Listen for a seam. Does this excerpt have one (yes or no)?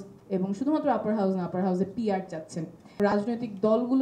yes